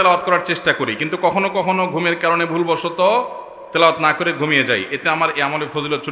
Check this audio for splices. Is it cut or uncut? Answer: uncut